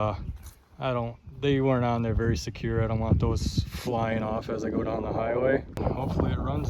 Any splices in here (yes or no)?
yes